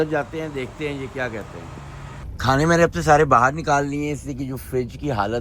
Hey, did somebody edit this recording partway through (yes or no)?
yes